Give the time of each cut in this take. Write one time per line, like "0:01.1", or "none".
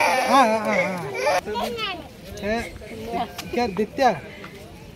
0:01.4